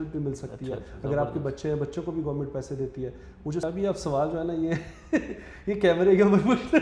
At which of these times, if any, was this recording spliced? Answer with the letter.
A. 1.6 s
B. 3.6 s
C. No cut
B